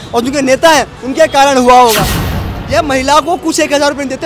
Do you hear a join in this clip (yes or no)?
yes